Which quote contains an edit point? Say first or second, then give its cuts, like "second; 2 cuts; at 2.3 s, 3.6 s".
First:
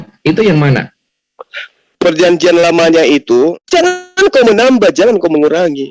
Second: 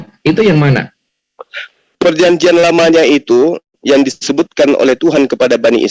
first; 1 cut; at 3.6 s